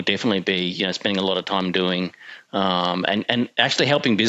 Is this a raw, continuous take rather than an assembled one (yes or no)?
yes